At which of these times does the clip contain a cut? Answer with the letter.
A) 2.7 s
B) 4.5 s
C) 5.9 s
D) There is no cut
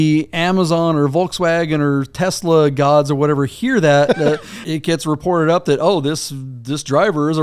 B